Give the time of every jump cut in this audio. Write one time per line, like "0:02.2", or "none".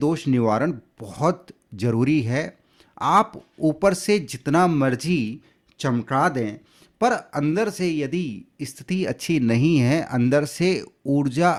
none